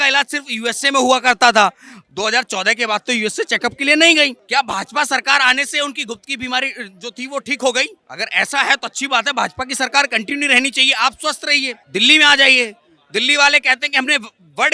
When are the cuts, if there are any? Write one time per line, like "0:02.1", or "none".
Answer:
none